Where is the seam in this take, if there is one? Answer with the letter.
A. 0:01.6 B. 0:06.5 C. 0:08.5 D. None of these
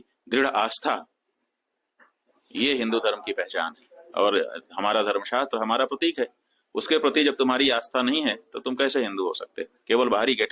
D